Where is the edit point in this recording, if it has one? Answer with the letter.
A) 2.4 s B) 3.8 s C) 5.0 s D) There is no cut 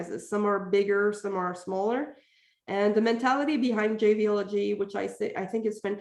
D